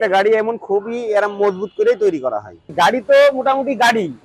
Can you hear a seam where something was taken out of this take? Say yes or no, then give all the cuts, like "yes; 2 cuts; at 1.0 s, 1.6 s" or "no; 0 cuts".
yes; 1 cut; at 2.6 s